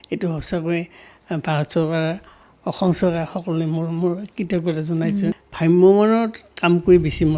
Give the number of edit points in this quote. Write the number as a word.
one